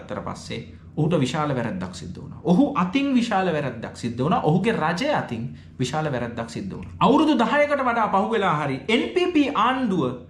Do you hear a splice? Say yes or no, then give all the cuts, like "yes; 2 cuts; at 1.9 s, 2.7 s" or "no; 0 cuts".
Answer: yes; 1 cut; at 6.8 s